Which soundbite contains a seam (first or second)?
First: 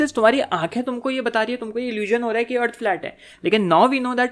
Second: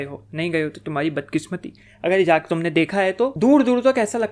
second